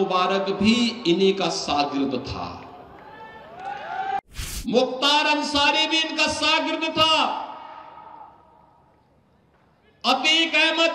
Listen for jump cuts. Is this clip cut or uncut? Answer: cut